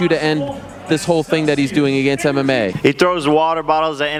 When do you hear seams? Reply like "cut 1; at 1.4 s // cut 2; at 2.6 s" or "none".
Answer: none